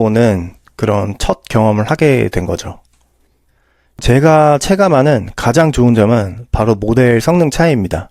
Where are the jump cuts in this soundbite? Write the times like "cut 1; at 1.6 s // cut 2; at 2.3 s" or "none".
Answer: cut 1; at 4.0 s

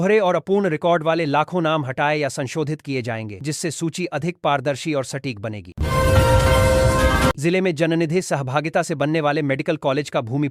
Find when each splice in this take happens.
cut 1; at 5.7 s // cut 2; at 7.4 s

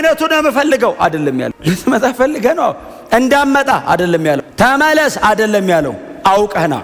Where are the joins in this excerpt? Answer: cut 1; at 1.5 s // cut 2; at 4.5 s

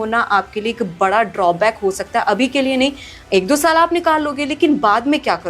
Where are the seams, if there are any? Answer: none

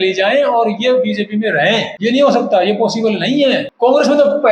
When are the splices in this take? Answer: cut 1; at 1.9 s // cut 2; at 3.7 s

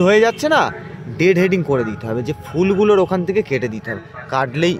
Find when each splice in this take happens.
none

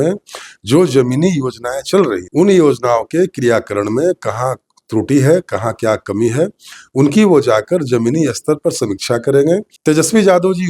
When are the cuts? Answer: cut 1; at 2.2 s // cut 2; at 9.7 s

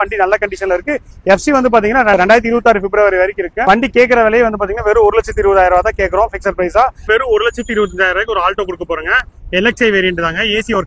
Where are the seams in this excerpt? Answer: cut 1; at 7.0 s

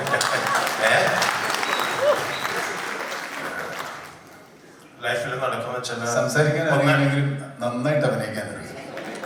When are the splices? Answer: none

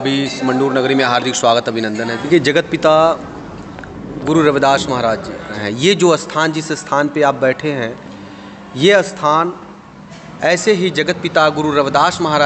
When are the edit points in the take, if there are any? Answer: cut 1; at 2.2 s // cut 2; at 5.6 s

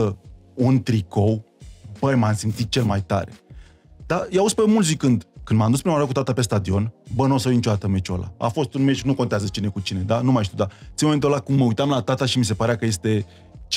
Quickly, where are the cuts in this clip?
none

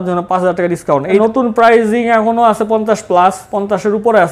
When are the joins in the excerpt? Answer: cut 1; at 1.2 s

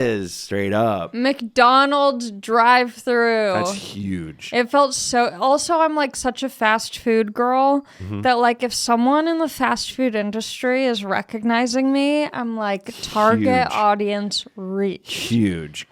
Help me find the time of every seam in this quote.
none

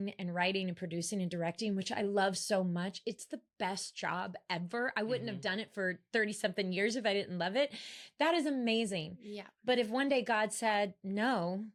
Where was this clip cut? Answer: none

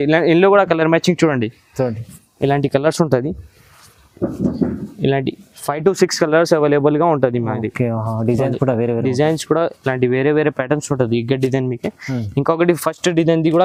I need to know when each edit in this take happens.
none

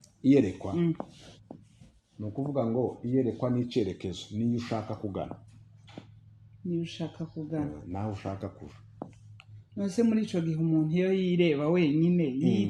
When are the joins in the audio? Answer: none

